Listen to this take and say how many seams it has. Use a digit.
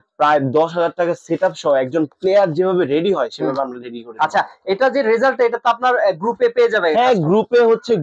0